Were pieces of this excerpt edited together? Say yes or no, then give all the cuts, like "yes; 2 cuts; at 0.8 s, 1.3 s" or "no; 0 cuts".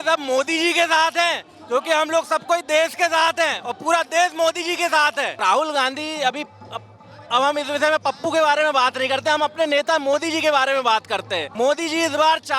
yes; 2 cuts; at 5.3 s, 11.4 s